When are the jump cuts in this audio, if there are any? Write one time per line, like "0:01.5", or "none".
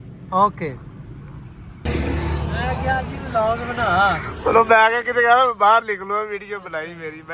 0:01.8